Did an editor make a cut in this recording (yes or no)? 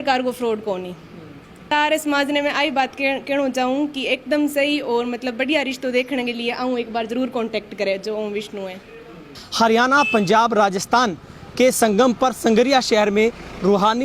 yes